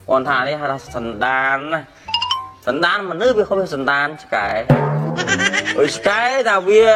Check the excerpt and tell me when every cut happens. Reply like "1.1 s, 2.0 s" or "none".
none